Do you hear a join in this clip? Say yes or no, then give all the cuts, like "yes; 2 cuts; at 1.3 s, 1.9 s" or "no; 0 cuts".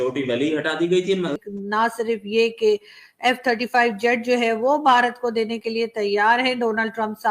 yes; 1 cut; at 1.4 s